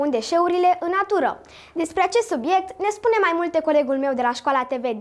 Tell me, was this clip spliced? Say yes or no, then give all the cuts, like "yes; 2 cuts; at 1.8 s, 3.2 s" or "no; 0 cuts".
no; 0 cuts